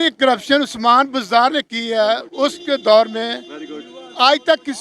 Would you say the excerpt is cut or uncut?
uncut